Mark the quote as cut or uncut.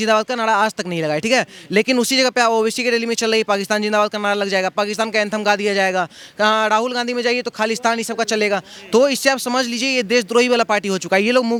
uncut